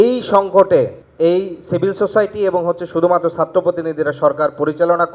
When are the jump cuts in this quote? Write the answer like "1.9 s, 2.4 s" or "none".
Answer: 1.0 s